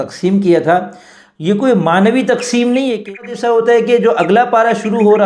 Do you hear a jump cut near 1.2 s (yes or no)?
no